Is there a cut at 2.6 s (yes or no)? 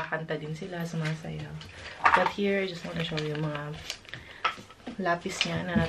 no